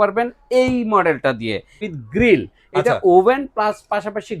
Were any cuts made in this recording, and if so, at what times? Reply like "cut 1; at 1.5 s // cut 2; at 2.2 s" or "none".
cut 1; at 1.9 s